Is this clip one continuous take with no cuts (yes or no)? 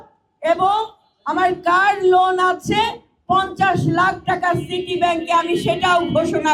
yes